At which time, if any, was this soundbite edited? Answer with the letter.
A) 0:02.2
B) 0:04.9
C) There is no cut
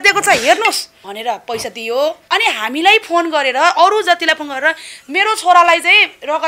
A